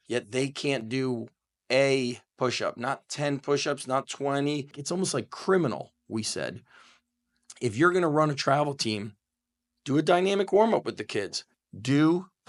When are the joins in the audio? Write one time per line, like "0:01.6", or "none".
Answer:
0:04.8